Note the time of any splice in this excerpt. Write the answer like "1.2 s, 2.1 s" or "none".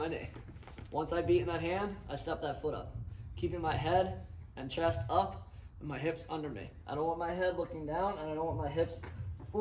none